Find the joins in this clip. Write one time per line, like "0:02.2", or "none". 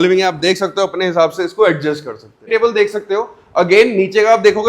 0:02.4